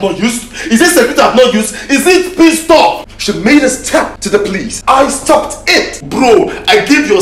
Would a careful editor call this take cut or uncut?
cut